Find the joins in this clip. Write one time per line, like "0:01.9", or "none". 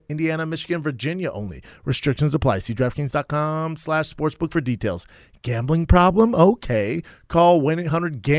none